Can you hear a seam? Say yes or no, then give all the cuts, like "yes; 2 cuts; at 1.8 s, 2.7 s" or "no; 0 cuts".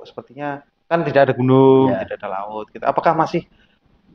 no; 0 cuts